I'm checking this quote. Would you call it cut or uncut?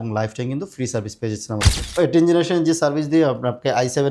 cut